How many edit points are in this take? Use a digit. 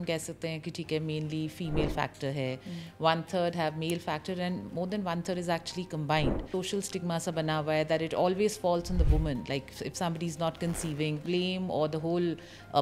2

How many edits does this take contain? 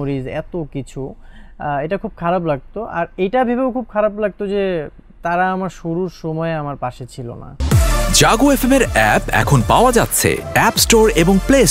1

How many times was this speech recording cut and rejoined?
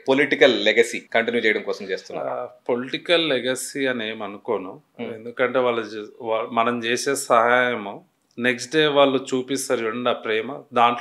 1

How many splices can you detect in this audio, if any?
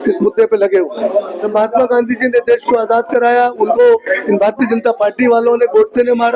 1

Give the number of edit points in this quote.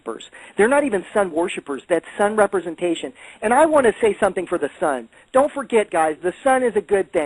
1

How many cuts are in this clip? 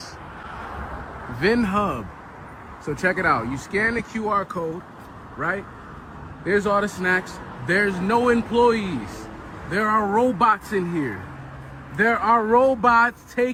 0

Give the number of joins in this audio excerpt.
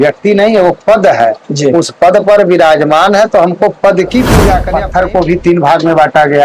1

